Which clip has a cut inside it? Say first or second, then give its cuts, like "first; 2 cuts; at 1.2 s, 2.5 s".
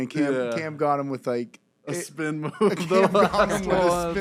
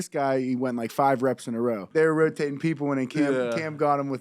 second; 1 cut; at 1.8 s